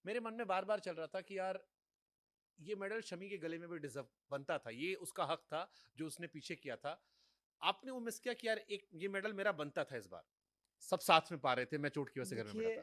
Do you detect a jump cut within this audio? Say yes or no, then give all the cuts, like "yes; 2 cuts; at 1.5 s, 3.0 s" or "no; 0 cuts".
no; 0 cuts